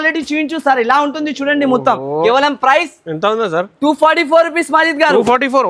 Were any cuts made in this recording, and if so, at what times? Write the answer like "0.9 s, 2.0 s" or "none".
2.2 s